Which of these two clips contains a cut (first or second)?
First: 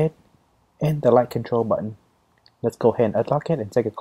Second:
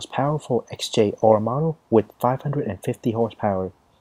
second